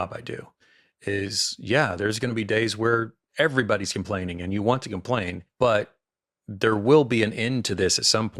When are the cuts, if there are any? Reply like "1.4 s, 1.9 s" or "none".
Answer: 5.4 s